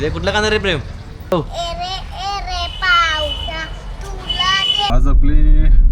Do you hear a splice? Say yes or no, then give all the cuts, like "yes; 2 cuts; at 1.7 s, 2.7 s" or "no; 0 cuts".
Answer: yes; 2 cuts; at 1.3 s, 4.9 s